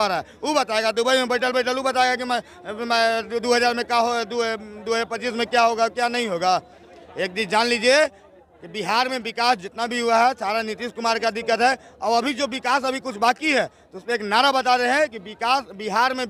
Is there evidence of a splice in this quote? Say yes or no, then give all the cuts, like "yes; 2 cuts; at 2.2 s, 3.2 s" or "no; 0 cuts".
no; 0 cuts